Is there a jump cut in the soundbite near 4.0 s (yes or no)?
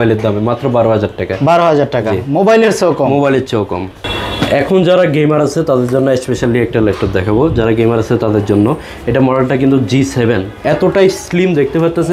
yes